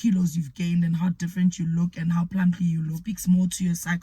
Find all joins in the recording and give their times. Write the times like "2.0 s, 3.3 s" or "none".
2.9 s